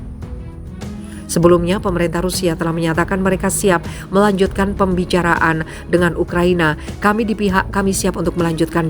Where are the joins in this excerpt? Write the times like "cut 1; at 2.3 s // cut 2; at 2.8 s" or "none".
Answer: cut 1; at 1.3 s